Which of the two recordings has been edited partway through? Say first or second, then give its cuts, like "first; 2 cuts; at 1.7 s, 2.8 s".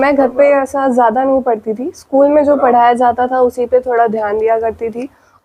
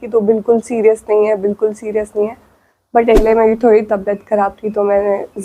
second; 1 cut; at 3.2 s